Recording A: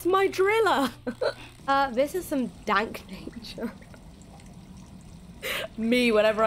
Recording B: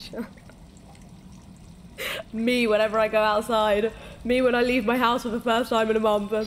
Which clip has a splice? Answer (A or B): A